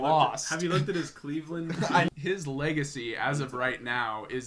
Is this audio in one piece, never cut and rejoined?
no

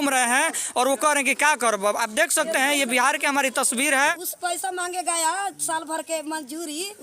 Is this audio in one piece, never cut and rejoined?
no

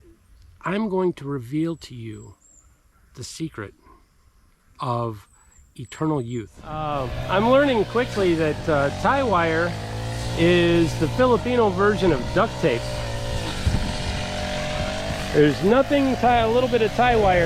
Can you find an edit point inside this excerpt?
yes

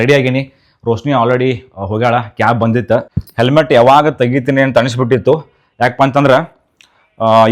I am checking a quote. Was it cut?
yes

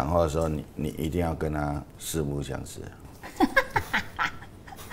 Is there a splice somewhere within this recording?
yes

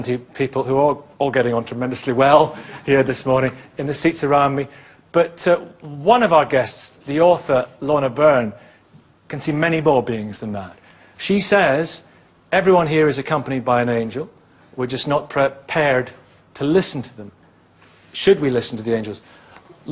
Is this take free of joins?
yes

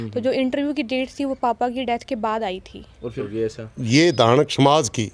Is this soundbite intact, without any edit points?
no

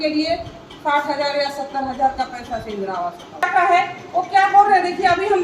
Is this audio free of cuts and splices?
no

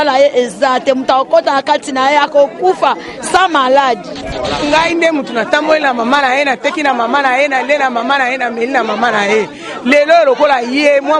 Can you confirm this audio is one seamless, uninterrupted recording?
no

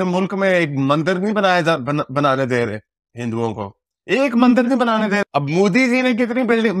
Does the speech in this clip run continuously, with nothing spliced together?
yes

